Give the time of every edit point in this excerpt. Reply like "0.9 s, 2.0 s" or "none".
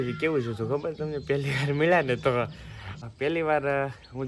3.0 s